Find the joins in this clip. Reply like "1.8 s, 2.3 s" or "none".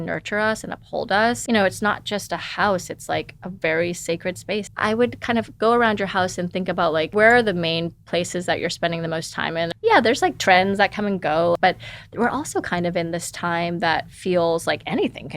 1.4 s, 4.7 s, 7.1 s, 9.7 s, 11.6 s